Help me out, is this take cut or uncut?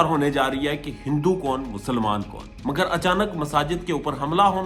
cut